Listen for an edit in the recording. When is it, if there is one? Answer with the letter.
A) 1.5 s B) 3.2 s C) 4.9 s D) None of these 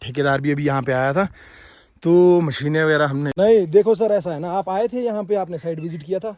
B